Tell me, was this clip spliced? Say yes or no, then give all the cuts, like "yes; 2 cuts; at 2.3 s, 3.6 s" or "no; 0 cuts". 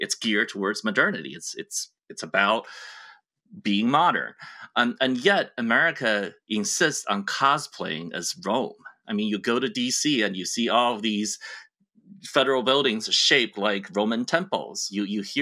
no; 0 cuts